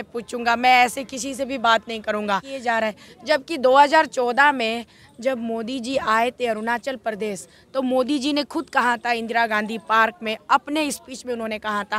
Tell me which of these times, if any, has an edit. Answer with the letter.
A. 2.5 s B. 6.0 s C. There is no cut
A